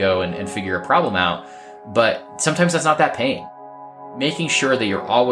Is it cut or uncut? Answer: cut